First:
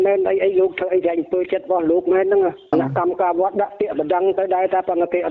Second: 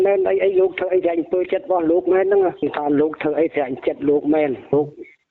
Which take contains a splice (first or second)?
first